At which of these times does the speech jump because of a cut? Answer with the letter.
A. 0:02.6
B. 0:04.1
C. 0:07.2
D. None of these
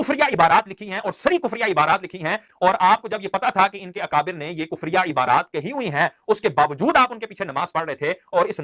D